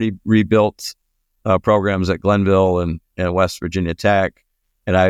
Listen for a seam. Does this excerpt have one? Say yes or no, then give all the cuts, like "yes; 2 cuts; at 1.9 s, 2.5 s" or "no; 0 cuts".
no; 0 cuts